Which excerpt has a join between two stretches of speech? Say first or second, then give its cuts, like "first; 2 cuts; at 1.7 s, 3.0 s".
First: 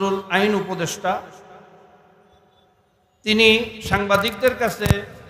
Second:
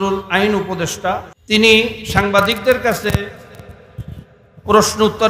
second; 1 cut; at 1.3 s